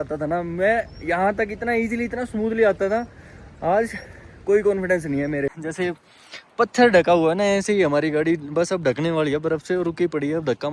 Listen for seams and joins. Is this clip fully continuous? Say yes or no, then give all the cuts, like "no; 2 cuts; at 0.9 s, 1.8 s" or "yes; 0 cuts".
no; 1 cut; at 5.6 s